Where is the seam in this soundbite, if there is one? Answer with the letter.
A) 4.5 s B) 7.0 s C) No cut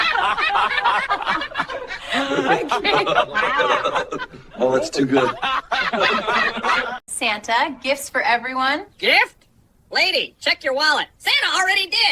B